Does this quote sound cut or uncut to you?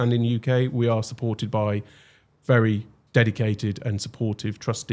uncut